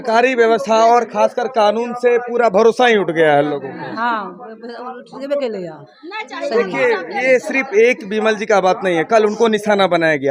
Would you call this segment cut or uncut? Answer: uncut